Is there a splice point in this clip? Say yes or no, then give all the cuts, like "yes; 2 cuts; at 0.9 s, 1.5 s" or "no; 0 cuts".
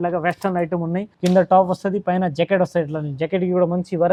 no; 0 cuts